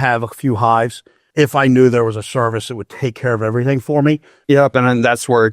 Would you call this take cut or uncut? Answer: cut